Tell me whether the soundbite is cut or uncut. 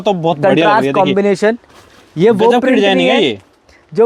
uncut